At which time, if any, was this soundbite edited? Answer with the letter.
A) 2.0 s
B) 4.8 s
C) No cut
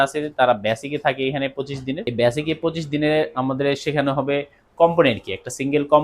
A